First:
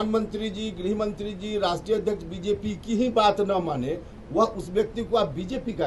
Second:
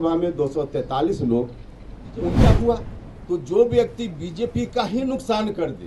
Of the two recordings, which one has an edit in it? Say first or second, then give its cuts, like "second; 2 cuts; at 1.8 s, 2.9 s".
second; 1 cut; at 2.4 s